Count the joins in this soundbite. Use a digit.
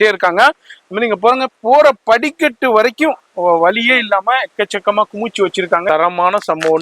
1